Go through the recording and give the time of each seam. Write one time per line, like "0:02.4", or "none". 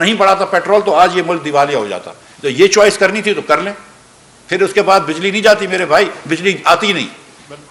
none